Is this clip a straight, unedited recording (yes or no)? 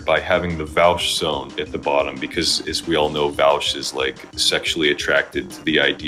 yes